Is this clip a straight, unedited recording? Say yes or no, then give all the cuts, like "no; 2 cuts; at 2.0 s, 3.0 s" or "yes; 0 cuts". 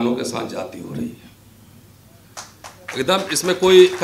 yes; 0 cuts